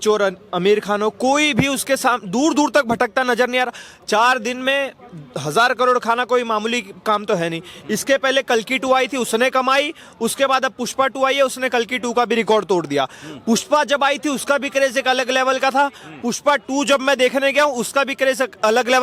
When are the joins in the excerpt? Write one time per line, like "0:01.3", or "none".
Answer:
none